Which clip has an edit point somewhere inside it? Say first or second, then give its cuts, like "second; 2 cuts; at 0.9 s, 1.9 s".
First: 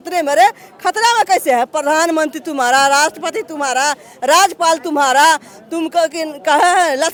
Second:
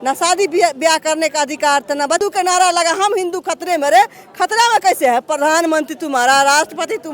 second; 1 cut; at 2.2 s